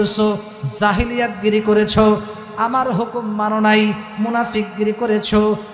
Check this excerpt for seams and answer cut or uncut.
uncut